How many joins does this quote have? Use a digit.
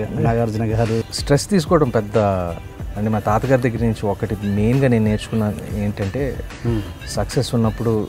1